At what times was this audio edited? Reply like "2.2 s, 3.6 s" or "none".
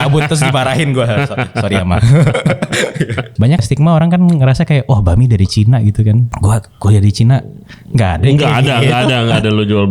3.6 s, 6.3 s